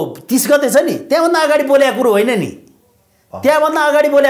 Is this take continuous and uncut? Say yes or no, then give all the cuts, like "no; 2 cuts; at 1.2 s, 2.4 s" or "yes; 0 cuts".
yes; 0 cuts